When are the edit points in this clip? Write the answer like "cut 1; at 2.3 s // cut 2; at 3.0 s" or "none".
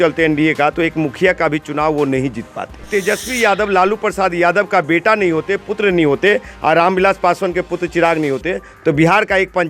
cut 1; at 2.8 s